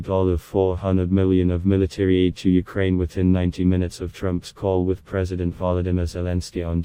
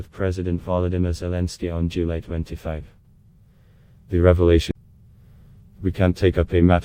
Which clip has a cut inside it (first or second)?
second